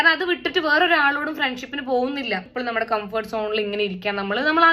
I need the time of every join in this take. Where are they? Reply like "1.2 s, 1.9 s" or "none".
2.5 s